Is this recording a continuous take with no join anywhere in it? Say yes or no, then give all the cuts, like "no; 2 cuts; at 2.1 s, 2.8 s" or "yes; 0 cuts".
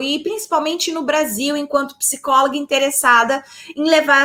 yes; 0 cuts